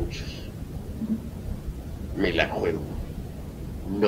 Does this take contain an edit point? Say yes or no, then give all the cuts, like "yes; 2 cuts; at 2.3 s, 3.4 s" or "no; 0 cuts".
yes; 1 cut; at 2.4 s